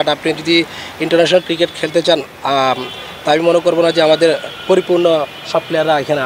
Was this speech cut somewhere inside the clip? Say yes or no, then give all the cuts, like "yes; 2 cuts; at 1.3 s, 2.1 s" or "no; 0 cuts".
no; 0 cuts